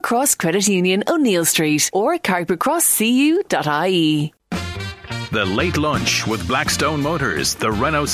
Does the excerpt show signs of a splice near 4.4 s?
yes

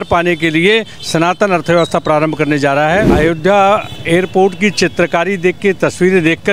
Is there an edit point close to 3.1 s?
yes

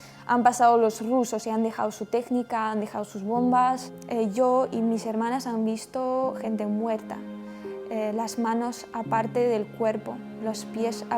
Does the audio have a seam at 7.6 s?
no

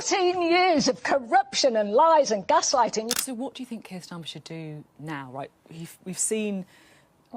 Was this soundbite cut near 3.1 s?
yes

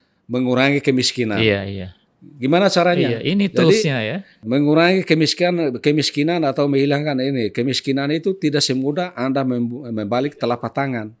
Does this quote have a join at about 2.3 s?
no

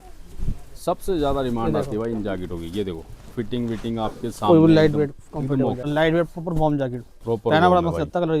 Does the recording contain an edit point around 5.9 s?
yes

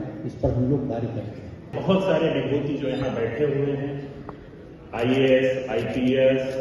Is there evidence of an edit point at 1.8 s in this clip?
yes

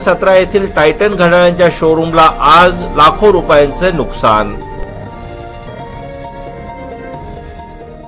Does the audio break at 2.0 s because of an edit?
no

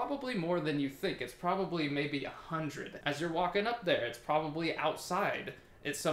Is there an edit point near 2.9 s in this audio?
yes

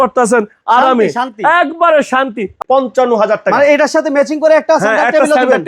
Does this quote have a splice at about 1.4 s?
no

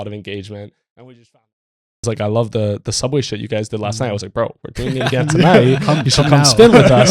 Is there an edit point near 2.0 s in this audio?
yes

